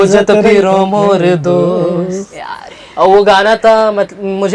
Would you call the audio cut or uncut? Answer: uncut